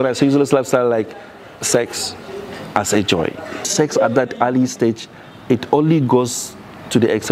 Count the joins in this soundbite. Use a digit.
1